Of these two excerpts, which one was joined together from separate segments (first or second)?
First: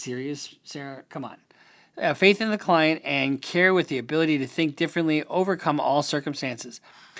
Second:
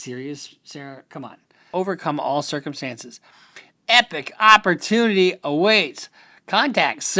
second